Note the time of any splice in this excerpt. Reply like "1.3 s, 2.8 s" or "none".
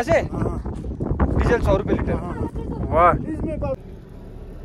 3.7 s